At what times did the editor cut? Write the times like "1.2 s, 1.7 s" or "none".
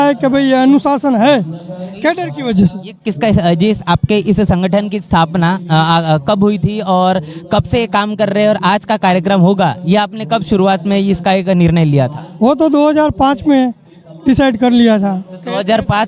none

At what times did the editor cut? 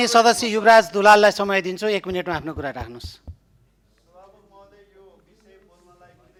none

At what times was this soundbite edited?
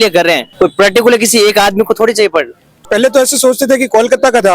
2.7 s

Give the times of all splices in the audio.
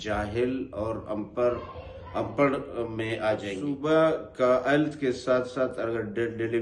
3.6 s

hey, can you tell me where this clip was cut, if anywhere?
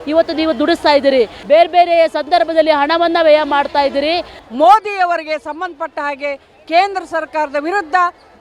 1.4 s, 4.4 s

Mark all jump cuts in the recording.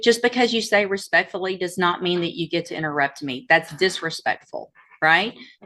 none

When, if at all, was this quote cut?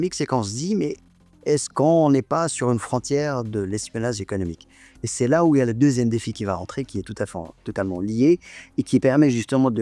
none

